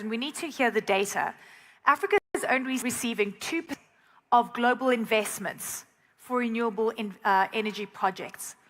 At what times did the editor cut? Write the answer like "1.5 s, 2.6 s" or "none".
3.7 s